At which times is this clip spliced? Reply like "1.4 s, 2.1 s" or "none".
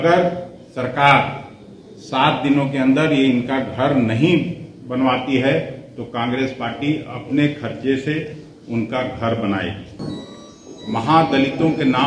10.0 s

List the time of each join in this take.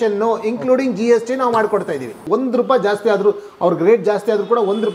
2.2 s

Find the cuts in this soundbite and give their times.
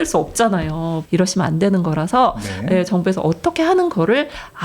1.0 s

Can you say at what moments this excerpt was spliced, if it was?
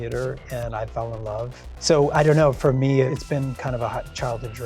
1.7 s, 3.1 s

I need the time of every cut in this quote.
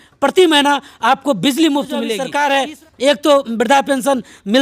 2.2 s

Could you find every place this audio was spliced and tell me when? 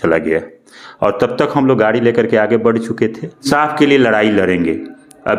3.5 s

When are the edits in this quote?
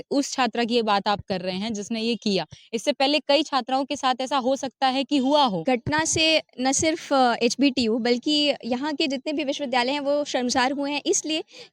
5.6 s

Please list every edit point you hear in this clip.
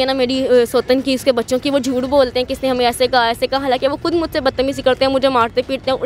none

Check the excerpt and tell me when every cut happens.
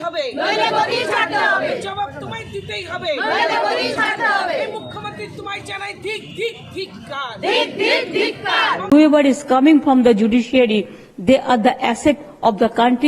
8.8 s

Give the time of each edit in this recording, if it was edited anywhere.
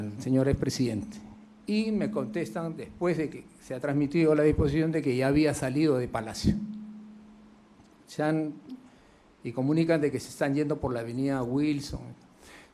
none

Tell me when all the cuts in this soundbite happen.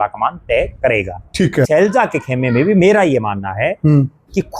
1.7 s

